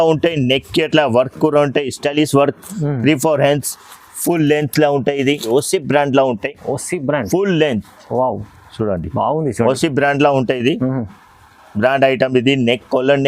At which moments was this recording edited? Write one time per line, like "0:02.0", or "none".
0:05.5